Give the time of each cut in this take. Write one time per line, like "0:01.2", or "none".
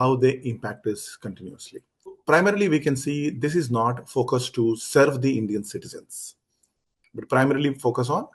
0:02.1